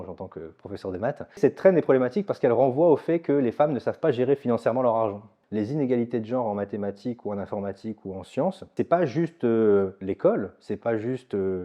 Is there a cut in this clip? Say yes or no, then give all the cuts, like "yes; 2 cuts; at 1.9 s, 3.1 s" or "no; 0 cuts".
yes; 3 cuts; at 1.4 s, 5.4 s, 8.7 s